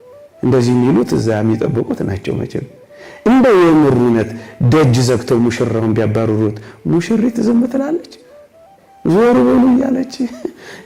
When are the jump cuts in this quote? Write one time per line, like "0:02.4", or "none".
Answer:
none